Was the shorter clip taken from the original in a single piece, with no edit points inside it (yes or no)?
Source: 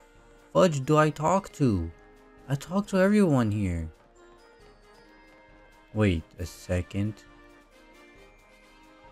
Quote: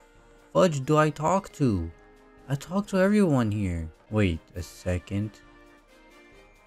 no